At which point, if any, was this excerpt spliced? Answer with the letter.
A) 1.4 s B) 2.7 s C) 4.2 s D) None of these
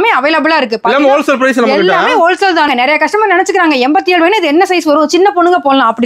B